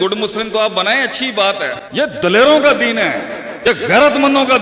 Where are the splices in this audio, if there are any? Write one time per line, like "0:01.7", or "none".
0:01.8
0:03.5